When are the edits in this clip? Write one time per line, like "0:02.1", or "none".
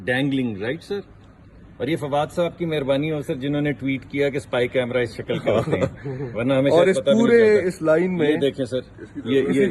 none